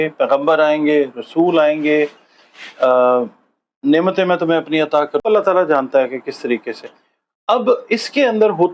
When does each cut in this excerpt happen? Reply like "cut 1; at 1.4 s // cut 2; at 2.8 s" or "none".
cut 1; at 5.2 s